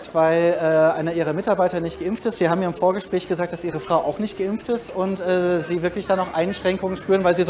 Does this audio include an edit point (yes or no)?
no